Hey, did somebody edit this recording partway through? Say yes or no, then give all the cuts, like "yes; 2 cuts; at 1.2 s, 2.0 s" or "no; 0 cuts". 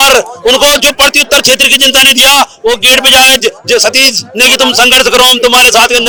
no; 0 cuts